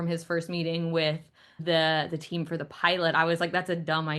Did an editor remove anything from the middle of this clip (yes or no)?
yes